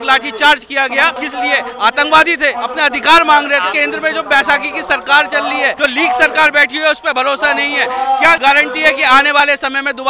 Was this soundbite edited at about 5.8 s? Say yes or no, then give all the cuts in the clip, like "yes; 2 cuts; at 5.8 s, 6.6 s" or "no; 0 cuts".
yes; 5 cuts; at 1.2 s, 2.6 s, 3.7 s, 5.8 s, 8.4 s